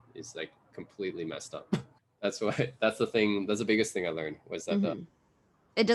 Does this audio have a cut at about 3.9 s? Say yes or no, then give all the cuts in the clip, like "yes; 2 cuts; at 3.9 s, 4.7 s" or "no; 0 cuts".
no; 1 cut; at 1.9 s